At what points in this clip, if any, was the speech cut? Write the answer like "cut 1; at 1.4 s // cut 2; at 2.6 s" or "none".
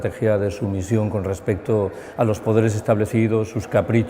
cut 1; at 3.1 s